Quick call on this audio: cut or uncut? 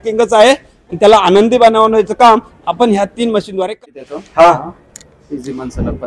cut